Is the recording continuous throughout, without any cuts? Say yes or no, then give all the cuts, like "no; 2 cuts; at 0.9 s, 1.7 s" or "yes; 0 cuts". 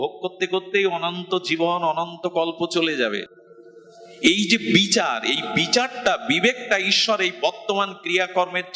no; 1 cut; at 3.4 s